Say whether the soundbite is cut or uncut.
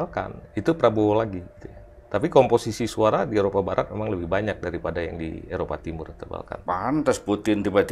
uncut